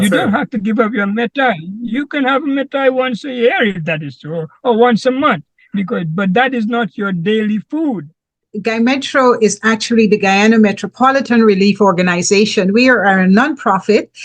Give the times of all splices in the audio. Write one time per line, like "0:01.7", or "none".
0:08.5